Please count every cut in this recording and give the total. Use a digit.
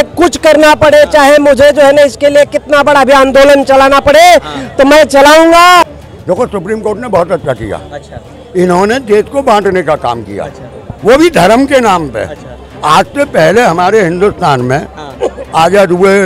1